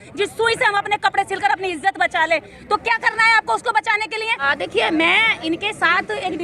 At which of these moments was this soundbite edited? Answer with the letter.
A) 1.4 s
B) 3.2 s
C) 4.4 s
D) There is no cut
C